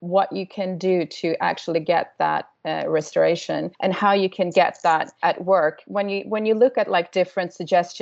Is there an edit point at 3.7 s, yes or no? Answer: yes